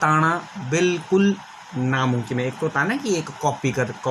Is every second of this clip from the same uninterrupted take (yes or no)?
yes